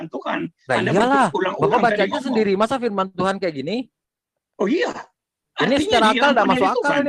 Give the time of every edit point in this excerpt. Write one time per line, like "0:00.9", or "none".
none